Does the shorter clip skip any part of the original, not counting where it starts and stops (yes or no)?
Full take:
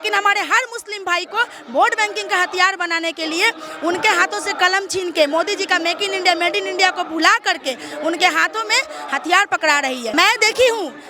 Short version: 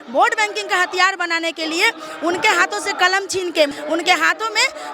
yes